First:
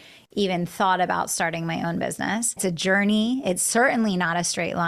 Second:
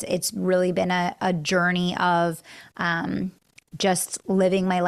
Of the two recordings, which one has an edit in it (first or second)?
first